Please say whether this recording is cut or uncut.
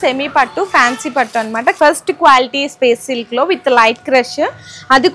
cut